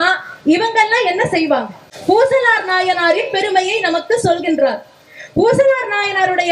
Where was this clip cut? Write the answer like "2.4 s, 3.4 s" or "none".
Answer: 1.9 s